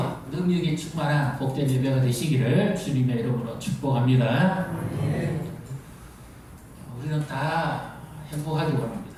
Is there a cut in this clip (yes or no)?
no